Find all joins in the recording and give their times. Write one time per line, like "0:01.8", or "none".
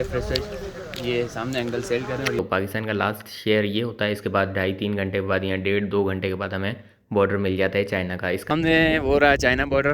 0:02.4
0:08.5